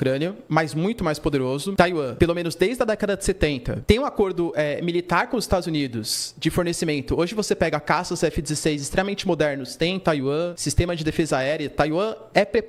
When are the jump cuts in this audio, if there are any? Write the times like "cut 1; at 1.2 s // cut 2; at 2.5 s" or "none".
none